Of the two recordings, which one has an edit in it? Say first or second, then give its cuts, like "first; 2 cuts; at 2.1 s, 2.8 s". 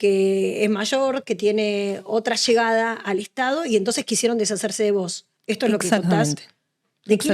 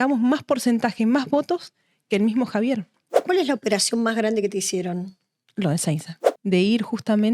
second; 2 cuts; at 3.2 s, 6.2 s